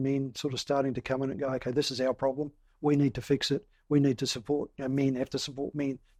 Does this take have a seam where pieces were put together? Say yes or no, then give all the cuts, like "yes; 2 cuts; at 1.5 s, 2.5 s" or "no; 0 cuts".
no; 0 cuts